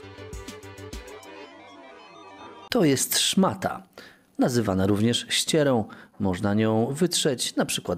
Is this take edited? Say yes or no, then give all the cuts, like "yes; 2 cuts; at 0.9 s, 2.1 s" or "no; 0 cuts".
yes; 1 cut; at 2.6 s